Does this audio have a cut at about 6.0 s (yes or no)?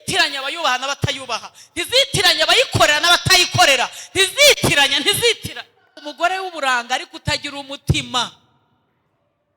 yes